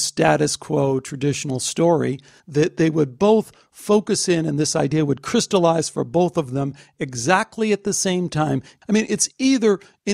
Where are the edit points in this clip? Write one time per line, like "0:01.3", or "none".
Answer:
0:02.3
0:08.7